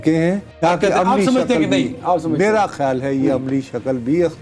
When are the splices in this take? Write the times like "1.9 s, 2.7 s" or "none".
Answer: none